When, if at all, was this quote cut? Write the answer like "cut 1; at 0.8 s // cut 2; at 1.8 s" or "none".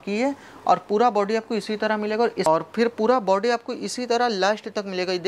cut 1; at 2.5 s